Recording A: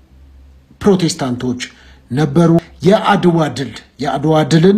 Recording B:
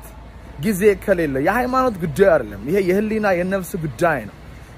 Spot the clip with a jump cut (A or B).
A